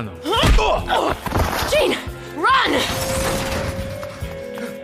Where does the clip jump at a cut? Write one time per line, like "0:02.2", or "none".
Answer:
0:01.6